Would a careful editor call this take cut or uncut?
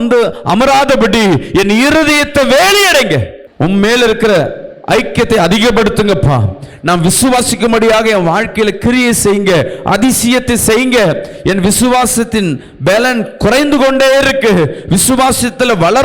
cut